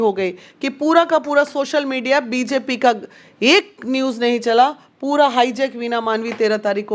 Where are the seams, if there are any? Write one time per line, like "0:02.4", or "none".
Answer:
none

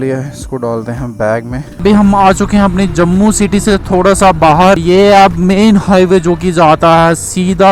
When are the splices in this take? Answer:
0:01.7
0:04.8

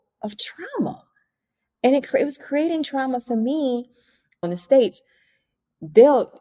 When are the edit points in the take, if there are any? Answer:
0:04.4

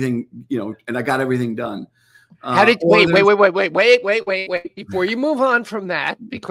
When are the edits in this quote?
none

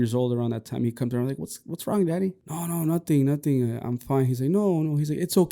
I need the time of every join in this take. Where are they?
0:02.5

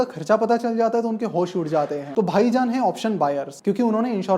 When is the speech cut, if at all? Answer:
0:02.0

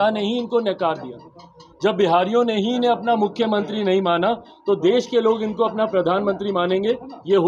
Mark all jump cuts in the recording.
none

